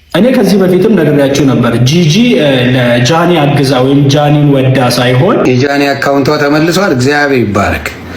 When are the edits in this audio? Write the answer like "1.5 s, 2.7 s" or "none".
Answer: 5.4 s